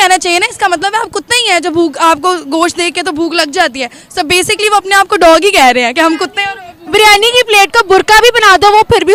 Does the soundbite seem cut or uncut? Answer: uncut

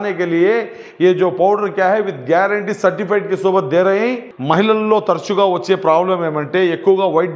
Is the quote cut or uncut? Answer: cut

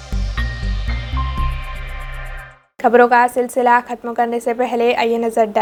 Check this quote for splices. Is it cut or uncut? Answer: uncut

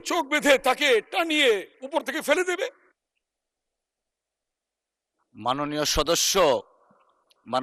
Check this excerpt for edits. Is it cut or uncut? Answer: uncut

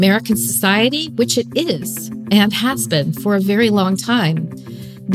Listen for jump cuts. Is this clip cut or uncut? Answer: uncut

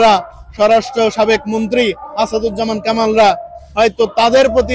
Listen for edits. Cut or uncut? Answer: uncut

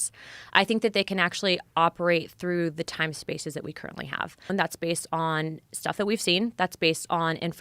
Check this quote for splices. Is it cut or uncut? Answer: cut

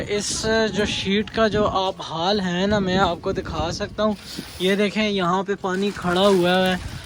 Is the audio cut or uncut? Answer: uncut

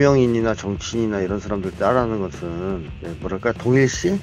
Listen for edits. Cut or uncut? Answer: uncut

